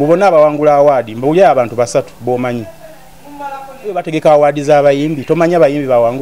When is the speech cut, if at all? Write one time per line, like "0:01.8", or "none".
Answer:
0:03.7